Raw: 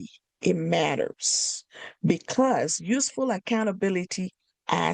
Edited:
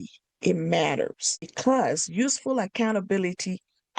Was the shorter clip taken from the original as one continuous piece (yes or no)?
no